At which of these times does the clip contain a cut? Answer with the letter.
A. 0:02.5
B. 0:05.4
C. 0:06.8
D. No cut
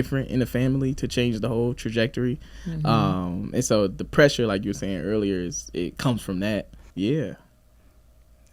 C